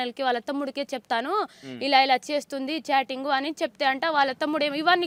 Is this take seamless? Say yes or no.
yes